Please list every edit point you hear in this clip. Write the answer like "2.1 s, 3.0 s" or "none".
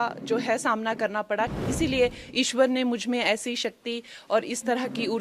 1.6 s